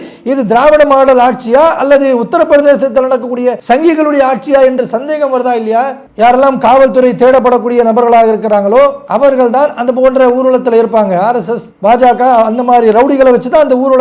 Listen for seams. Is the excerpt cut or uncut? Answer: cut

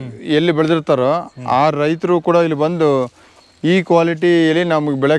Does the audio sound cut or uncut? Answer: uncut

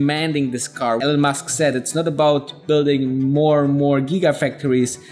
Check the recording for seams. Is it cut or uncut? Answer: cut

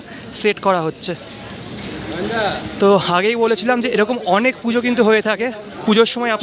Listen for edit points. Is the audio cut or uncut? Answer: uncut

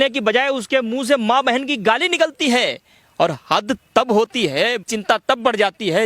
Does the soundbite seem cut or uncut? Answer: cut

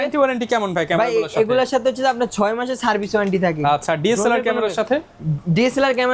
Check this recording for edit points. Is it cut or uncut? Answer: uncut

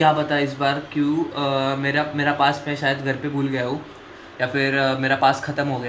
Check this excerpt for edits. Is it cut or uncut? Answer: uncut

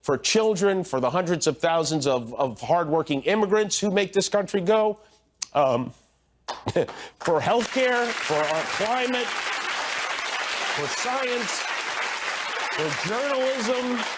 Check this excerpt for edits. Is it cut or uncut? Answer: cut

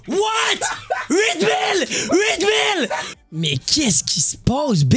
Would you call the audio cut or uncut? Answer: cut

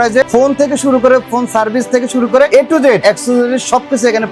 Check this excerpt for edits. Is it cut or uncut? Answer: cut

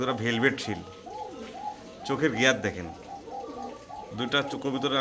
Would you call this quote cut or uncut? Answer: uncut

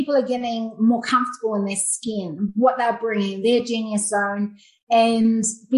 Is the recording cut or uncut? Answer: uncut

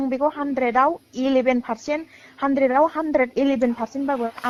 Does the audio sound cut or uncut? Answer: uncut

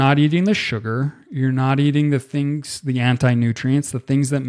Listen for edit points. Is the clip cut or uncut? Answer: uncut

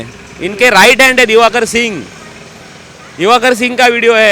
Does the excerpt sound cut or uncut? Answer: uncut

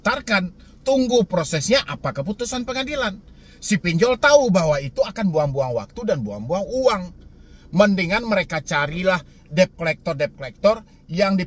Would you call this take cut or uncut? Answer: uncut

